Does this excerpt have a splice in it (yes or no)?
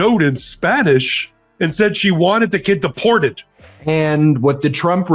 yes